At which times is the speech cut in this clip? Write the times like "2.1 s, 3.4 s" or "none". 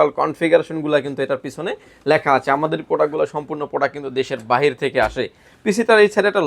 none